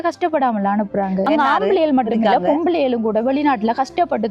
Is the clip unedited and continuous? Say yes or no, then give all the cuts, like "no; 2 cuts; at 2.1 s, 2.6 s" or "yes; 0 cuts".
no; 1 cut; at 1.2 s